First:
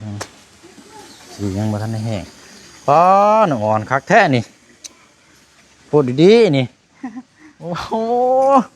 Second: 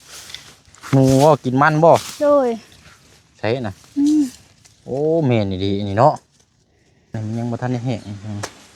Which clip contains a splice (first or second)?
second